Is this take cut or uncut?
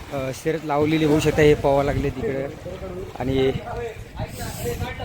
uncut